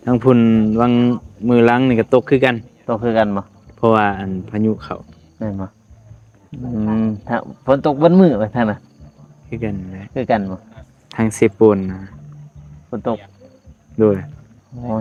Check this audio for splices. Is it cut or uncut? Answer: uncut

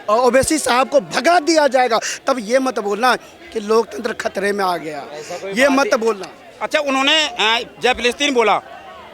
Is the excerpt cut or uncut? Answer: uncut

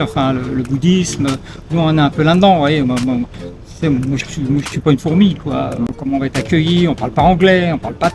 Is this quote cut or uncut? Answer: cut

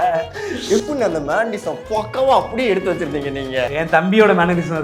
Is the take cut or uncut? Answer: cut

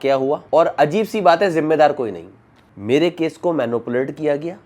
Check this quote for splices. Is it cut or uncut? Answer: cut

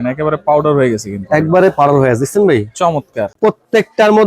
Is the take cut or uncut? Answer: cut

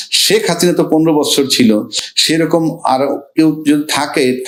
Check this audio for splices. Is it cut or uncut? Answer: uncut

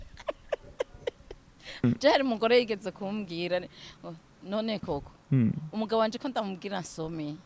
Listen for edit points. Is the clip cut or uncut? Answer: cut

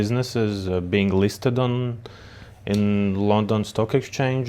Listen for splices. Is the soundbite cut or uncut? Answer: uncut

